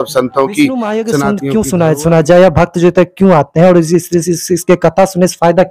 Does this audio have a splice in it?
yes; 1 cut; at 1.1 s

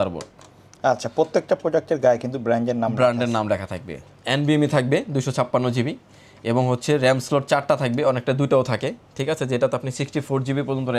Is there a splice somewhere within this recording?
no; 0 cuts

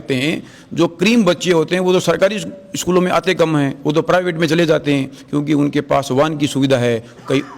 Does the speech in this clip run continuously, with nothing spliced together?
yes; 0 cuts

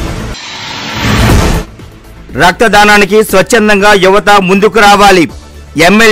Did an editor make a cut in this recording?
yes; 1 cut; at 1.3 s

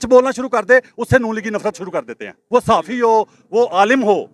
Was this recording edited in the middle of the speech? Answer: yes; 1 cut; at 2.4 s

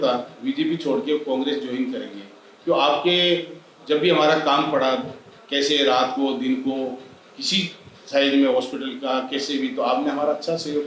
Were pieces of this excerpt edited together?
no; 0 cuts

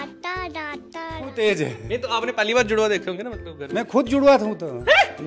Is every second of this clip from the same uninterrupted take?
no; 1 cut; at 1.3 s

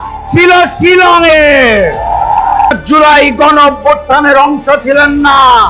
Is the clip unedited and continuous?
no; 1 cut; at 2.7 s

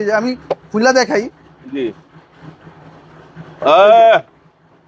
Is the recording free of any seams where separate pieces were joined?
yes; 0 cuts

